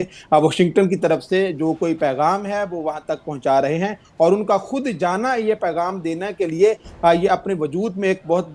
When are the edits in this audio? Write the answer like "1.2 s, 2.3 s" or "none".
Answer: none